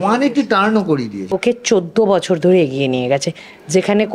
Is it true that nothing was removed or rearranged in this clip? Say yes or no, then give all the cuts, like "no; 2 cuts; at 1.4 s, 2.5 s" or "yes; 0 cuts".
no; 1 cut; at 1.3 s